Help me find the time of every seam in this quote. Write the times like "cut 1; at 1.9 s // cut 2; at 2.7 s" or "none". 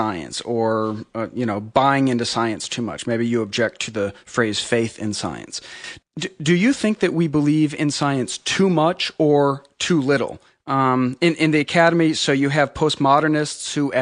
cut 1; at 5.6 s